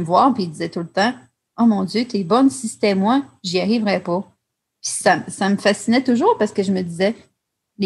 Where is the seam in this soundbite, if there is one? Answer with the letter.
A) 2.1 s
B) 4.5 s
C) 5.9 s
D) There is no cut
D